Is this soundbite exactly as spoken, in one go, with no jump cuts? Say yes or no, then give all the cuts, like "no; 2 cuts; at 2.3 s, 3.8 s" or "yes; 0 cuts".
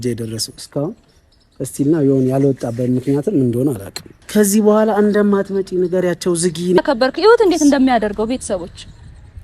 no; 1 cut; at 4.2 s